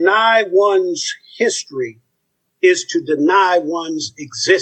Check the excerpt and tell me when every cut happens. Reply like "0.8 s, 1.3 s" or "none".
none